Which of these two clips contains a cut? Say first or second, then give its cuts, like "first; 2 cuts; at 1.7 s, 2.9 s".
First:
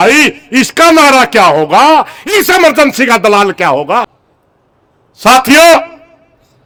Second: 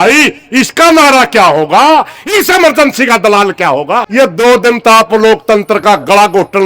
second; 1 cut; at 4.1 s